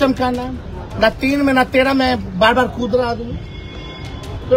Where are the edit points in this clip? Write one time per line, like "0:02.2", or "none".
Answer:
none